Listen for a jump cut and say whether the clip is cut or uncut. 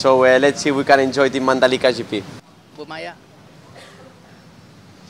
cut